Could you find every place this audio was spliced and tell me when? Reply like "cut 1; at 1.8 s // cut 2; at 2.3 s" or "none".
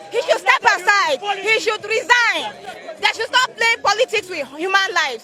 none